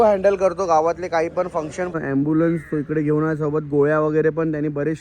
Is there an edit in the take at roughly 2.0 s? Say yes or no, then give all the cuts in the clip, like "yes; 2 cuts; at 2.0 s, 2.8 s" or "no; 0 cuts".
yes; 1 cut; at 2.0 s